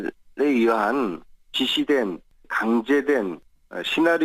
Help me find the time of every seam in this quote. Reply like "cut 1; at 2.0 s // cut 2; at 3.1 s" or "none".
none